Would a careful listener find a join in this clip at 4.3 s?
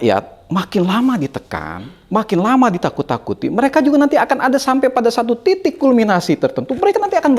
no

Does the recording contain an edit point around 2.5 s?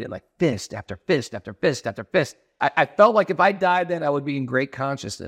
yes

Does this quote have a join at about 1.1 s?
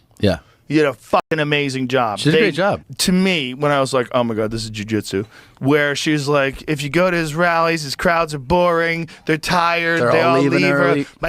no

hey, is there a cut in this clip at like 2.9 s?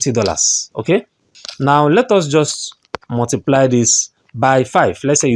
no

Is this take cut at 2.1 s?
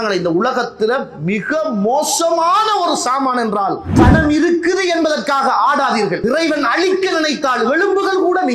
no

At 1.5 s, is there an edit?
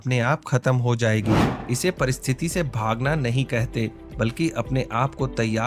yes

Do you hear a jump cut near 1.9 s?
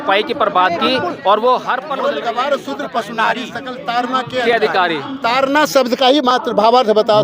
yes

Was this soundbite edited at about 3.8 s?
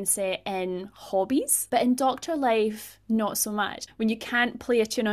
yes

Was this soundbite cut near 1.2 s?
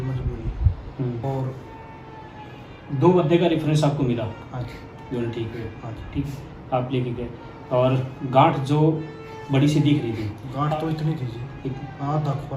yes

